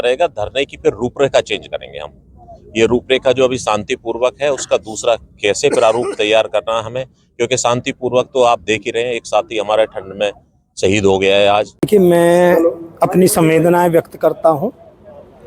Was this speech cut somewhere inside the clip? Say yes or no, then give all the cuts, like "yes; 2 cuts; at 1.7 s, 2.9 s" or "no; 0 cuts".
yes; 1 cut; at 11.9 s